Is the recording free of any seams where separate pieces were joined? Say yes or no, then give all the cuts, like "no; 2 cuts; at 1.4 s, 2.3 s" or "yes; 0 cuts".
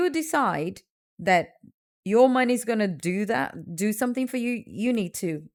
yes; 0 cuts